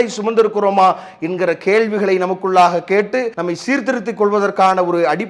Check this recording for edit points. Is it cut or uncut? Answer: cut